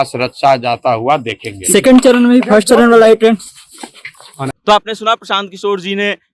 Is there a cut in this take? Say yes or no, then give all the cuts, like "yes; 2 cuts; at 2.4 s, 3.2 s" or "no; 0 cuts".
no; 0 cuts